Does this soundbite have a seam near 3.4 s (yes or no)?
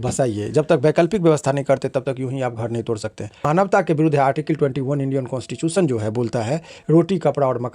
yes